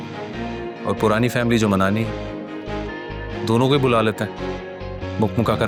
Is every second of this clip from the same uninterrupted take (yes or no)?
yes